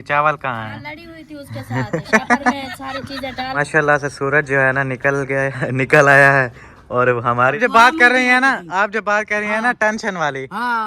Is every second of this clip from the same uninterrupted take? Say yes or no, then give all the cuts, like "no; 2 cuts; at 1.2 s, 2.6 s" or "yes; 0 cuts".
no; 2 cuts; at 3.6 s, 7.6 s